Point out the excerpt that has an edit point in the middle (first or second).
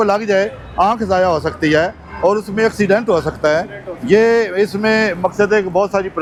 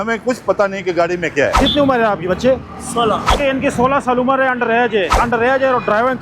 second